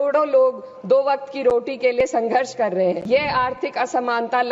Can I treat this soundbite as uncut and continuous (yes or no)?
no